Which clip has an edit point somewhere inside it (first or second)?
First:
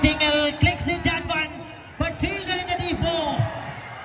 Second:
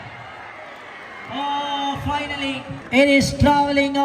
second